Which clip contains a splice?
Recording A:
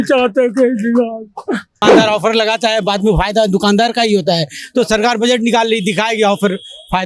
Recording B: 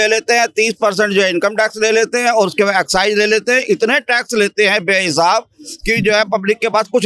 A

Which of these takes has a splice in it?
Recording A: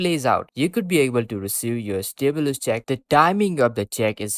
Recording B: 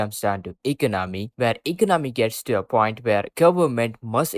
A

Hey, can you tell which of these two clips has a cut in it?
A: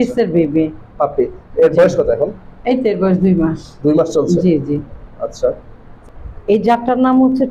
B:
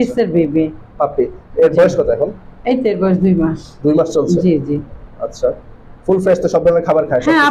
A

